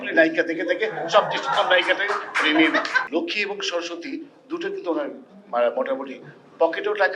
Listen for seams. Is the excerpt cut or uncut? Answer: cut